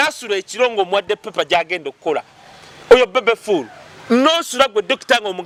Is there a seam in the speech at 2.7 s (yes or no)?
no